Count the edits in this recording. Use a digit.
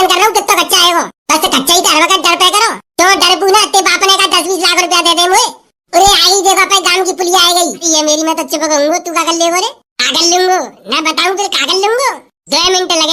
1